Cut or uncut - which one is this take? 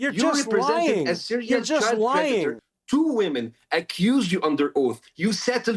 cut